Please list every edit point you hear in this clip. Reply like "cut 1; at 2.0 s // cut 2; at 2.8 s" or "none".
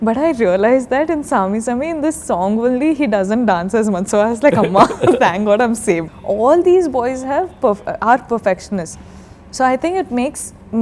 cut 1; at 6.1 s